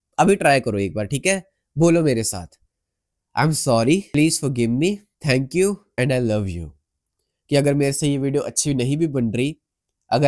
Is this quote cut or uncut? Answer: cut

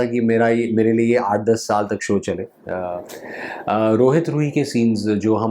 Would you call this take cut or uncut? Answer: cut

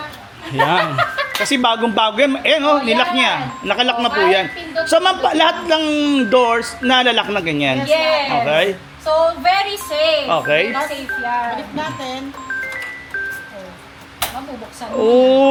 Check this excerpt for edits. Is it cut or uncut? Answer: uncut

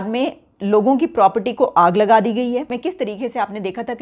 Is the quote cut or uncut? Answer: cut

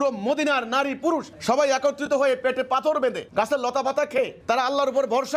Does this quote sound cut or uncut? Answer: cut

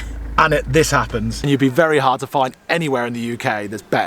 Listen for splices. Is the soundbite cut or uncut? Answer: cut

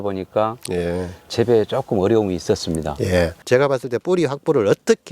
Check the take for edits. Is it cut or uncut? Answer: cut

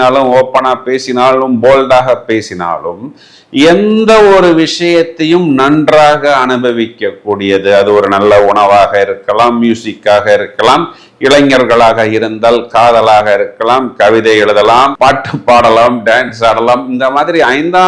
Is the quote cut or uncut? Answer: uncut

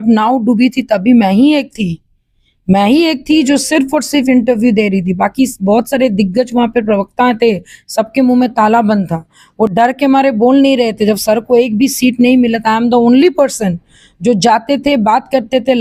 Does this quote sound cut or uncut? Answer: uncut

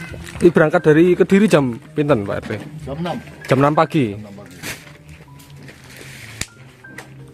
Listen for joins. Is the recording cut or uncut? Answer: uncut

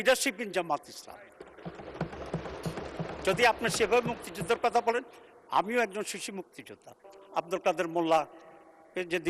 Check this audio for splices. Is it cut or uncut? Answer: cut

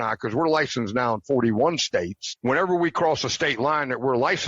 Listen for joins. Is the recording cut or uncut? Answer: cut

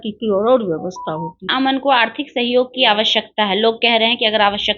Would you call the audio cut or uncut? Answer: cut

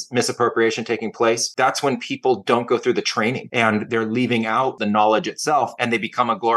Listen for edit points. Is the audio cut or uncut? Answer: cut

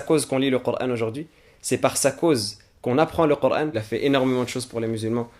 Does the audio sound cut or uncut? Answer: cut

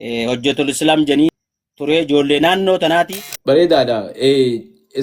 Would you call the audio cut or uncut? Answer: cut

